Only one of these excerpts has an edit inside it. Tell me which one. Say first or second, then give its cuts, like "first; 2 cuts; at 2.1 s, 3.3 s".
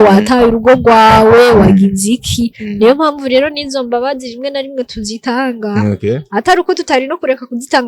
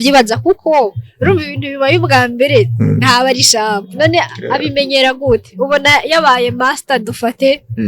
second; 1 cut; at 3.9 s